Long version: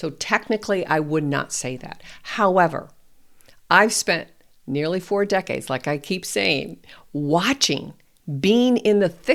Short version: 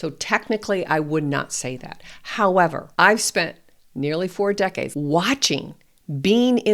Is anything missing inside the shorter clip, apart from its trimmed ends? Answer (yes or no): yes